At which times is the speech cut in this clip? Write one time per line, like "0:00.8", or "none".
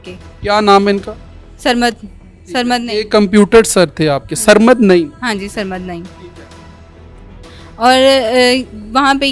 none